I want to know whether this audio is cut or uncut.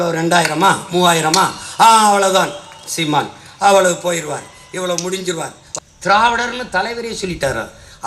cut